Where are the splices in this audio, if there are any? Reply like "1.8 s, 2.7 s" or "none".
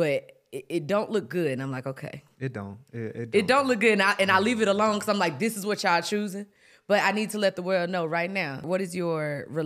8.7 s